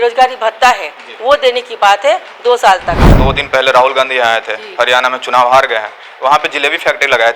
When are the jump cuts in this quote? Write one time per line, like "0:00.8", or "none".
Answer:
0:03.1